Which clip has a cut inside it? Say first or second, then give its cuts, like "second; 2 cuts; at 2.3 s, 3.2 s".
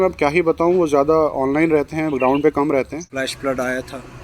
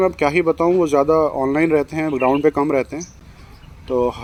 first; 1 cut; at 3.0 s